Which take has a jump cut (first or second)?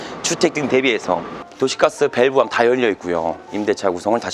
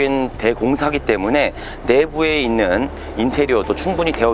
first